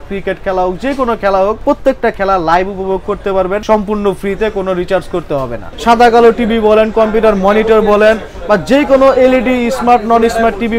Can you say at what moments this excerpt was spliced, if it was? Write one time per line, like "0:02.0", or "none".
0:01.6
0:03.6
0:05.6